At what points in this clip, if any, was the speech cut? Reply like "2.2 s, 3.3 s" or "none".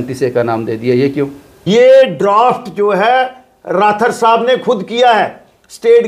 1.5 s